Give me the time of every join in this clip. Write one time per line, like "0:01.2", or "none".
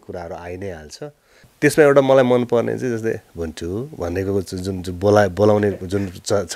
0:01.5